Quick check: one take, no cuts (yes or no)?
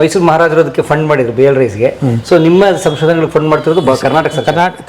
yes